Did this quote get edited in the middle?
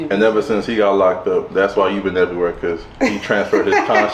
no; 0 cuts

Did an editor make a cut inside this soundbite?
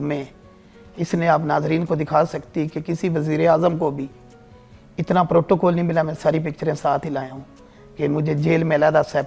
no; 0 cuts

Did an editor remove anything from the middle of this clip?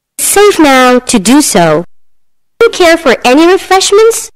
yes; 1 cut; at 2.6 s

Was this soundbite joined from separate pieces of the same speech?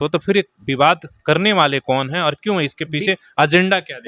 no; 0 cuts

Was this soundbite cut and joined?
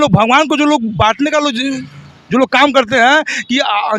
no; 0 cuts

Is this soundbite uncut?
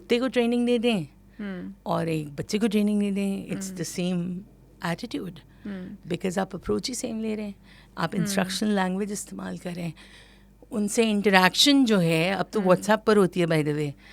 yes; 0 cuts

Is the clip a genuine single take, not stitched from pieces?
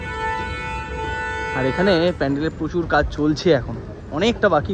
yes; 0 cuts

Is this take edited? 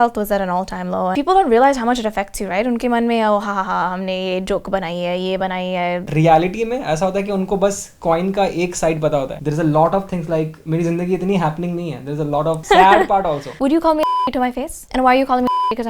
yes; 4 cuts; at 1.1 s, 6.1 s, 12.6 s, 13.5 s

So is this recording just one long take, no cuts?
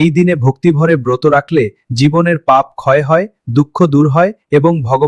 yes; 0 cuts

